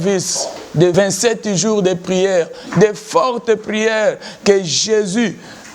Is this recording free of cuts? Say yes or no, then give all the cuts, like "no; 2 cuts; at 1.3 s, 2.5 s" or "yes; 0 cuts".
no; 1 cut; at 0.9 s